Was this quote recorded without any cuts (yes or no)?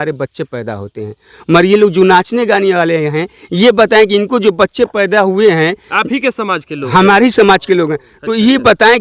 yes